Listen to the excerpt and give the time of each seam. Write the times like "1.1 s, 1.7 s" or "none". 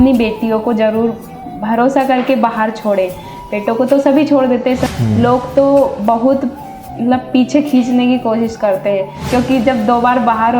4.8 s, 9.2 s